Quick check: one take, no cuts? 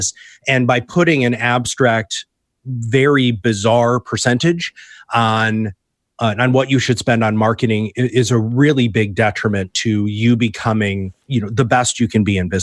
no; 1 cut; at 11.1 s

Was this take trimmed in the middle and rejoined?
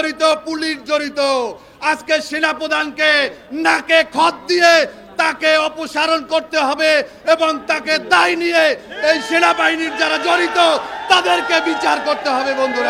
no; 0 cuts

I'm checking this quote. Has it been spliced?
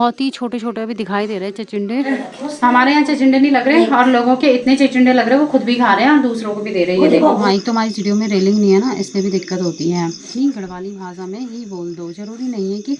yes; 3 cuts; at 2.1 s, 7.4 s, 10.3 s

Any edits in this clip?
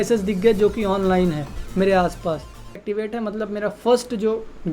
yes; 1 cut; at 2.8 s

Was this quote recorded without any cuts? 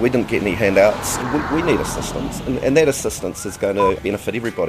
no; 1 cut; at 1.2 s

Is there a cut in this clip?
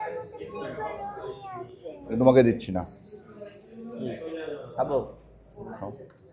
no; 0 cuts

